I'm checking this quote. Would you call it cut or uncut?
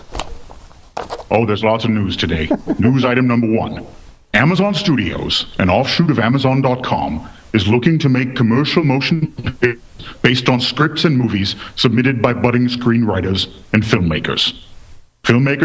uncut